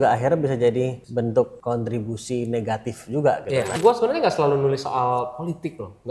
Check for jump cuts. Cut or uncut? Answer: cut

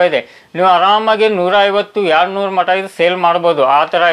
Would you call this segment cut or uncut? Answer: uncut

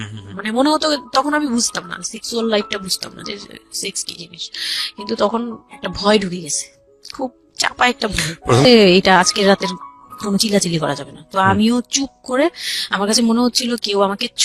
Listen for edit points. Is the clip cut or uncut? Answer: cut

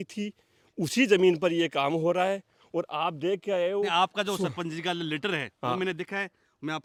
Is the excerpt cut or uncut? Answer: uncut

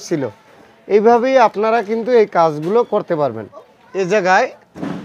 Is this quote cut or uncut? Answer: cut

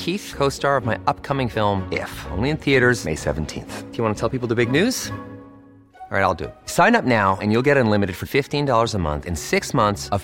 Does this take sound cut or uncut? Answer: uncut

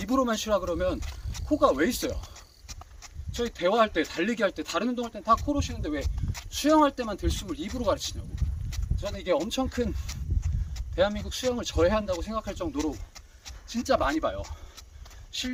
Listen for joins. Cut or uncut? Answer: uncut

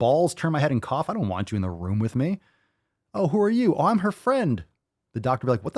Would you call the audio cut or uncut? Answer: uncut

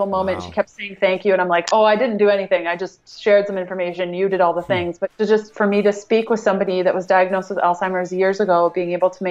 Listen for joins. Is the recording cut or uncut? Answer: cut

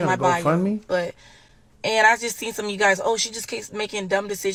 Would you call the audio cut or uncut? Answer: uncut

